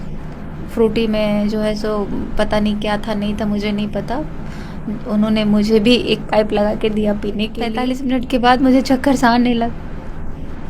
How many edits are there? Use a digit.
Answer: 1